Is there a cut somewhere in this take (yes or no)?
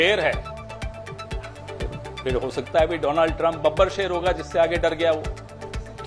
no